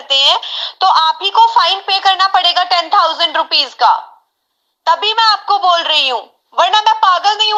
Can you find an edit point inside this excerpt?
no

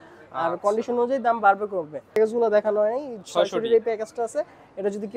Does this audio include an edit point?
yes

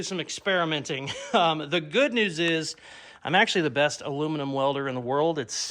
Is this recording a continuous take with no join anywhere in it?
yes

